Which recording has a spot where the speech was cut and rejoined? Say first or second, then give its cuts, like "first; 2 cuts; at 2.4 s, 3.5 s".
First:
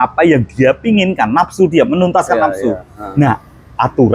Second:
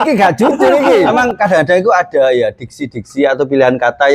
second; 1 cut; at 1.1 s